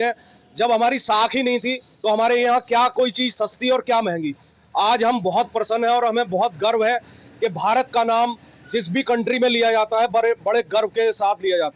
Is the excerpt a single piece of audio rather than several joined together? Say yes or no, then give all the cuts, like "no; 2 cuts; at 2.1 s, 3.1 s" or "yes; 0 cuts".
yes; 0 cuts